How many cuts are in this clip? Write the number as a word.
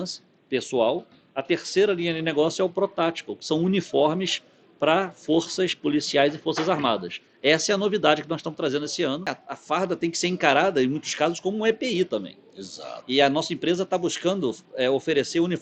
one